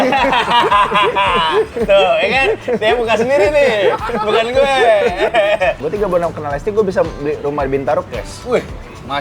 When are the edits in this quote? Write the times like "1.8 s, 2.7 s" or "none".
5.8 s